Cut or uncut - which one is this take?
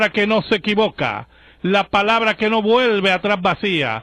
uncut